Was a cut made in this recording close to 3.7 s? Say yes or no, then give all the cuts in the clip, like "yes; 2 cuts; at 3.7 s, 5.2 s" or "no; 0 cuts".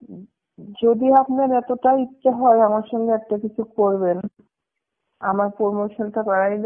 no; 0 cuts